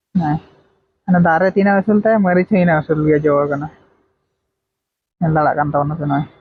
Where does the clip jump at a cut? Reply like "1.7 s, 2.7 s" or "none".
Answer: none